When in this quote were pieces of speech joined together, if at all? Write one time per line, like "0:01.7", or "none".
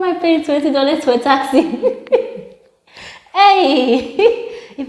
none